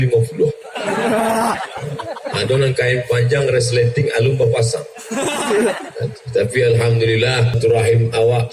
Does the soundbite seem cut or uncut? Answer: cut